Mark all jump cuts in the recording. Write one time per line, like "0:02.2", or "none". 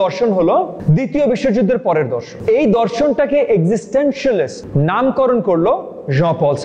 0:02.4

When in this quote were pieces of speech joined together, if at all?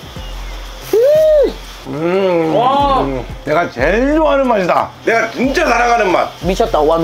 0:03.4

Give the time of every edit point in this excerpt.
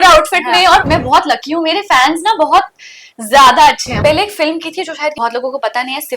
0:00.9
0:03.9
0:05.1

